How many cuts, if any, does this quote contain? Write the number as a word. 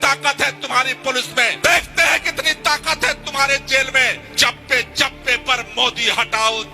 two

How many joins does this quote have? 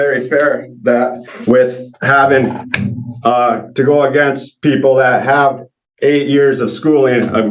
zero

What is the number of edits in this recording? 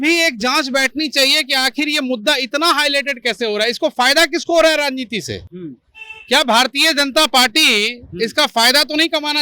zero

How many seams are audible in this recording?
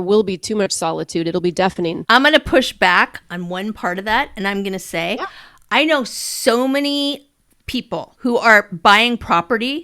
two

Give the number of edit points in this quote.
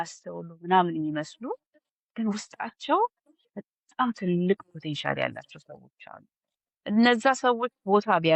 zero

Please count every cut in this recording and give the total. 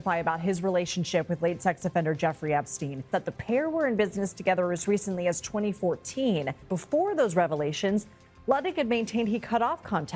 two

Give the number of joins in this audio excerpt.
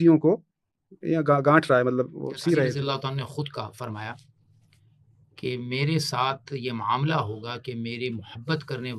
one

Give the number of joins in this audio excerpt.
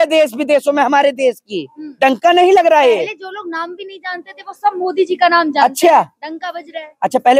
zero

